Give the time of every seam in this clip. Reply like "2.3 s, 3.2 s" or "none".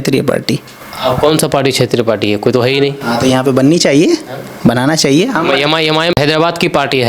6.2 s